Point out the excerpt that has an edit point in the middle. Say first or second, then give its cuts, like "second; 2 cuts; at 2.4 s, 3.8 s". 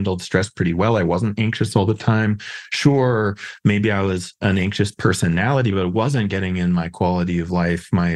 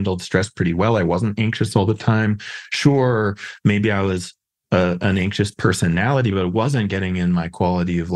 first; 1 cut; at 4.4 s